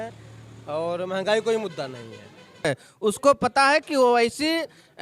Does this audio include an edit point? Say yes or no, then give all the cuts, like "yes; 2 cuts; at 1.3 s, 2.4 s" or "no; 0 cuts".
yes; 1 cut; at 2.6 s